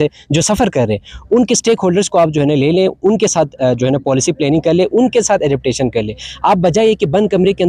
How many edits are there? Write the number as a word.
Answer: zero